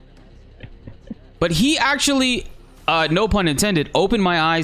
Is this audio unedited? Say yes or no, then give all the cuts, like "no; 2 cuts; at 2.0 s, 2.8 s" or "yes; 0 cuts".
no; 1 cut; at 1.3 s